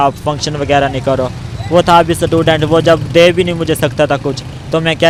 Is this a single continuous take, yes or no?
yes